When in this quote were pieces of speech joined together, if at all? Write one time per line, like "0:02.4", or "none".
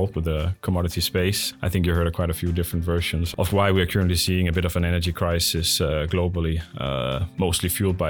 none